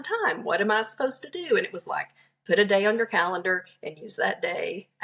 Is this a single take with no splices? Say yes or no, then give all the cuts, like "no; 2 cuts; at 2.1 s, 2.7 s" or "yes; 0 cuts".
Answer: yes; 0 cuts